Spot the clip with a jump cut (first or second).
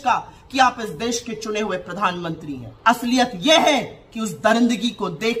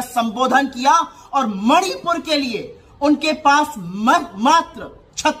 first